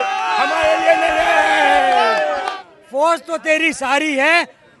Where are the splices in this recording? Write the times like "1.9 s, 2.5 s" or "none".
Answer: 2.6 s

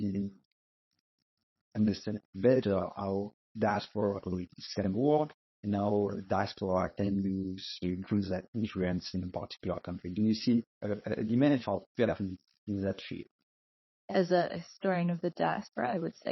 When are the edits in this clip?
none

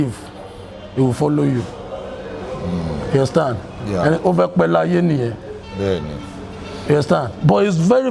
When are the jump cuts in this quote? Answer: none

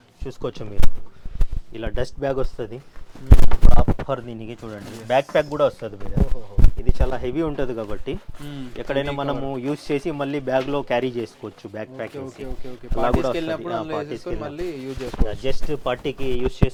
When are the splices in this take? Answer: none

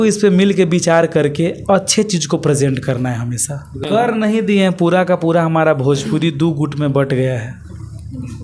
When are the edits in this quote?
3.8 s

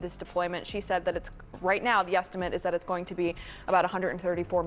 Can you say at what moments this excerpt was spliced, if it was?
none

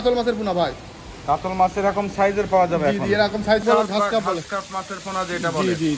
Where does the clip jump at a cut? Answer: 3.6 s

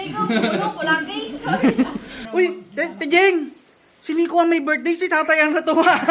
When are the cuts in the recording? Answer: 2.2 s

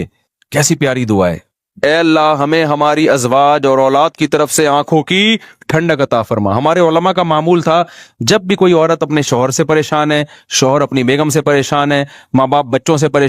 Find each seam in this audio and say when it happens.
1.8 s

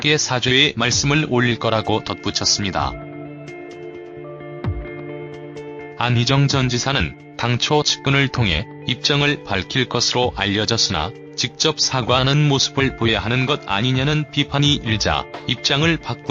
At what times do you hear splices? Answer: 3.7 s

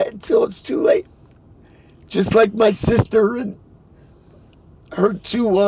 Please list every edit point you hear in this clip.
none

